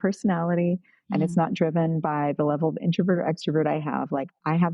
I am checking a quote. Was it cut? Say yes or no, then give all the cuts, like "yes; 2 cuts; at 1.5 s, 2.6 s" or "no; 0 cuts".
no; 0 cuts